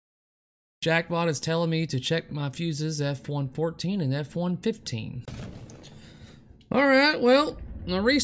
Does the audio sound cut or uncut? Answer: cut